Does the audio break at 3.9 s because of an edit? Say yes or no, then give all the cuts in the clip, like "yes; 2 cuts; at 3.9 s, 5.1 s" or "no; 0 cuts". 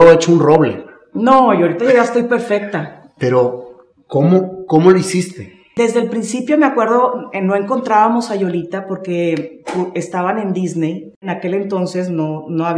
no; 2 cuts; at 5.6 s, 11.3 s